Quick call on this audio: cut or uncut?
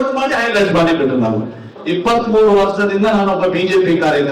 cut